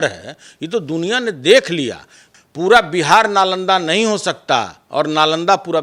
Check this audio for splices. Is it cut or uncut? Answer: cut